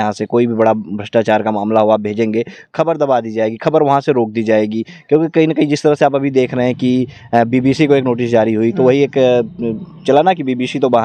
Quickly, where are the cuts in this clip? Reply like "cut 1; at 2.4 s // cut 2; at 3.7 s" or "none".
none